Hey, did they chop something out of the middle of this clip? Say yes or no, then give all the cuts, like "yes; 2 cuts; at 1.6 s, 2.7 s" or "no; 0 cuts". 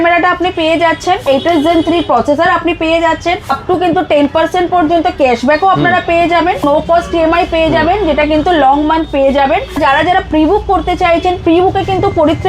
yes; 4 cuts; at 1.2 s, 3.5 s, 6.6 s, 9.7 s